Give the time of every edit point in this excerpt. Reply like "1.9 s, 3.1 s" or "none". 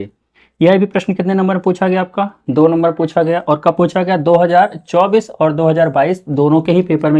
none